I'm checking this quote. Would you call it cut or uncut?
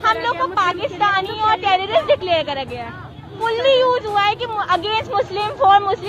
cut